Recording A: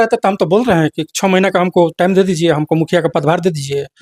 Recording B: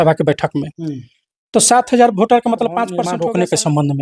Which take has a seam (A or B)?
B